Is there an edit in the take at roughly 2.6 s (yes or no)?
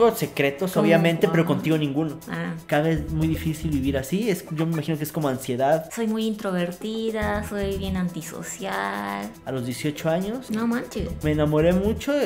yes